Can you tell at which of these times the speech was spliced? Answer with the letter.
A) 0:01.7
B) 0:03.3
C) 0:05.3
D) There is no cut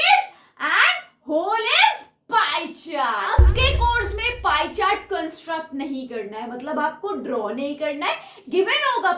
B